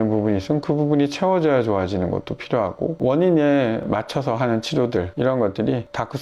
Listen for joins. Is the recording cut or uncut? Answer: cut